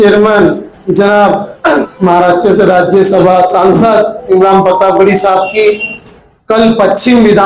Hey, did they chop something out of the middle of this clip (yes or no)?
yes